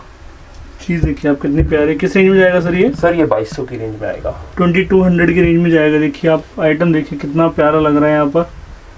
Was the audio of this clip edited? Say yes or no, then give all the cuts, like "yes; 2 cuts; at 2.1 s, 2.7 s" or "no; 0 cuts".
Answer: no; 0 cuts